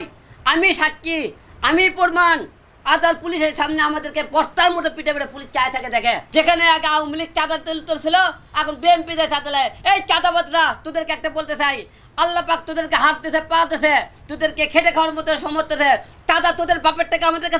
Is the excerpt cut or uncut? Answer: cut